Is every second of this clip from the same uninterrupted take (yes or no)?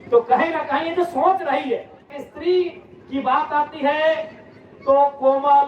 no